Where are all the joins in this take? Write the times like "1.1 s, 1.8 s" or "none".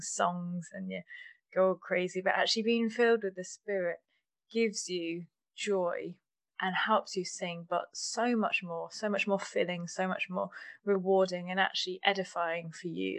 none